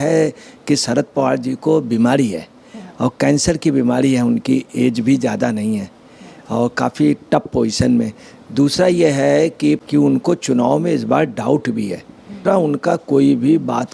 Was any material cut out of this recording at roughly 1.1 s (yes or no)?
no